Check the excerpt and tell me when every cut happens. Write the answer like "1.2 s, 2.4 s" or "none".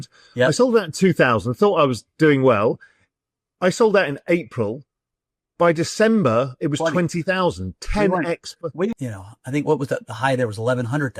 8.9 s